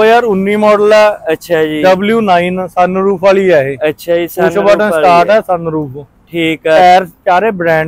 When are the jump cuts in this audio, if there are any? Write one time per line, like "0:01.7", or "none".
none